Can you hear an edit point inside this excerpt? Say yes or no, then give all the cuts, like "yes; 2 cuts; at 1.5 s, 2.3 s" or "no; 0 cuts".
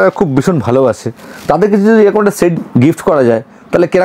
yes; 1 cut; at 2.5 s